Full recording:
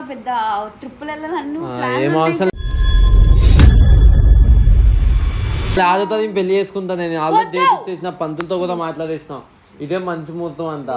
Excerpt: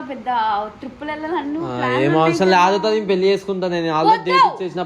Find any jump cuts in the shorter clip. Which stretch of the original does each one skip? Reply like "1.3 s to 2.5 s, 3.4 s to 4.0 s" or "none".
2.5 s to 5.8 s